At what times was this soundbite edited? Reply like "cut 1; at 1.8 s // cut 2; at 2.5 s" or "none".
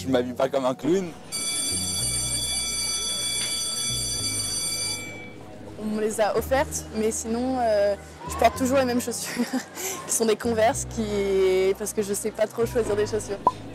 none